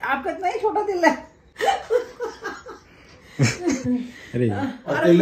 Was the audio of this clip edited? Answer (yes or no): no